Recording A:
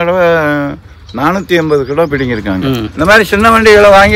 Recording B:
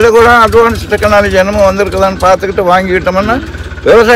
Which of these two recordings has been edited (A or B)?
A